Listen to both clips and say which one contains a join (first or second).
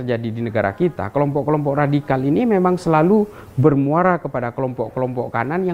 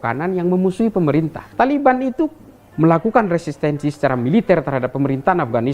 second